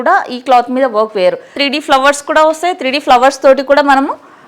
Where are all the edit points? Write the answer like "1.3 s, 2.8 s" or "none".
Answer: 1.6 s